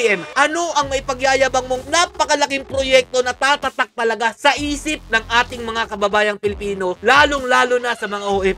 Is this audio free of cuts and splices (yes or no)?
no